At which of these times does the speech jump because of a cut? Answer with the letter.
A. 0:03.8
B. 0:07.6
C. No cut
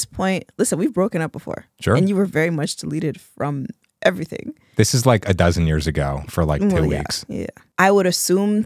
B